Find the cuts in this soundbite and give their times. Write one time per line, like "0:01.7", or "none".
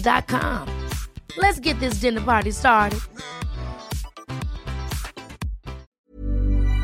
0:05.9